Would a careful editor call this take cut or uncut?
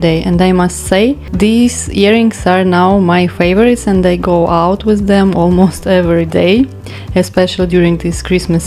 cut